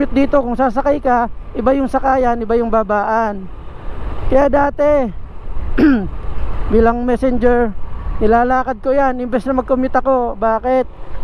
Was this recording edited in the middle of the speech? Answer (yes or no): no